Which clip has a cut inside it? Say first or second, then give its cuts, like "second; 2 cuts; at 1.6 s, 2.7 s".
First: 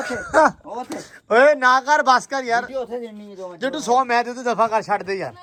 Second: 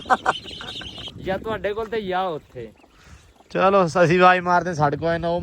second; 1 cut; at 1.1 s